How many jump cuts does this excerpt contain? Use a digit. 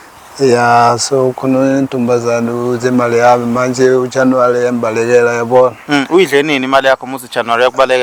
0